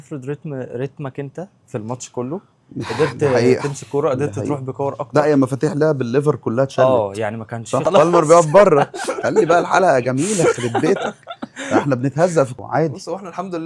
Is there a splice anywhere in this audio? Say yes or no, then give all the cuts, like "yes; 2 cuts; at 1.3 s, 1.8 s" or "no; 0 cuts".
yes; 2 cuts; at 7.8 s, 12.5 s